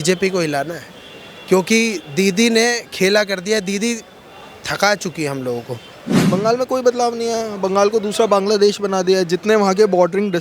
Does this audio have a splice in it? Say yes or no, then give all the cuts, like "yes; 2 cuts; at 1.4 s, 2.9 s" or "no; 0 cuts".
yes; 1 cut; at 6.1 s